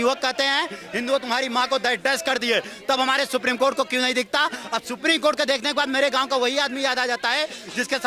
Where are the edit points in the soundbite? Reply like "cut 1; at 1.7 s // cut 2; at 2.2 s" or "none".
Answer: none